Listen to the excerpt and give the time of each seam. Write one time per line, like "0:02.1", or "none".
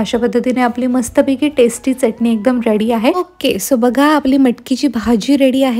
0:03.3